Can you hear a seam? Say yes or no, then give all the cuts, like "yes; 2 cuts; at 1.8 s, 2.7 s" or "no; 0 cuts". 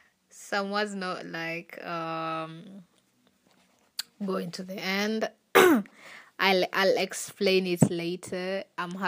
no; 0 cuts